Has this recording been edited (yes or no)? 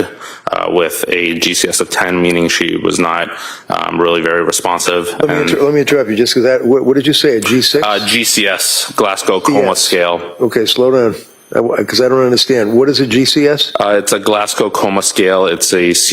no